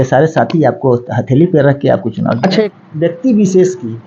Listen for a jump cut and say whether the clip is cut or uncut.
cut